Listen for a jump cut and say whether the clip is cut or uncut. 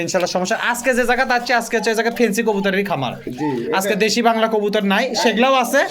uncut